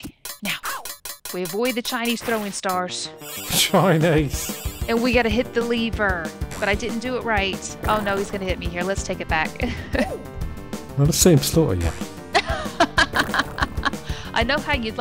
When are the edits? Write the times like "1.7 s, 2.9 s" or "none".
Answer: none